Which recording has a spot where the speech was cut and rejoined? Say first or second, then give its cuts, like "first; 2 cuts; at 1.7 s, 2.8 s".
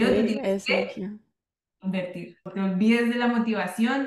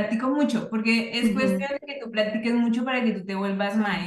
first; 1 cut; at 2.4 s